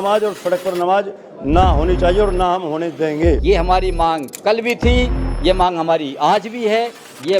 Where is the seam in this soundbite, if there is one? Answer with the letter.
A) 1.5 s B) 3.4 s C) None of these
B